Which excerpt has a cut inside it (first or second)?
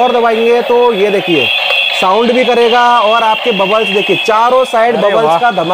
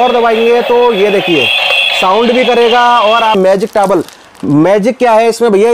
second